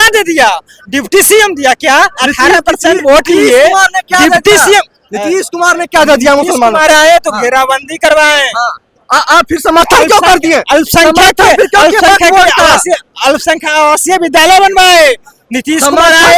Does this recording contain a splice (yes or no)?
no